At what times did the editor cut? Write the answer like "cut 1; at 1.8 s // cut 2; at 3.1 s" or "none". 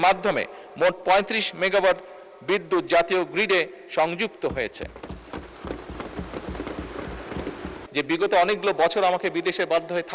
cut 1; at 7.8 s